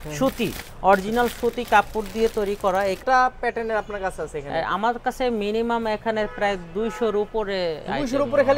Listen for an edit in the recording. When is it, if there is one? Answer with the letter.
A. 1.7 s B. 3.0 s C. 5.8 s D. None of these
B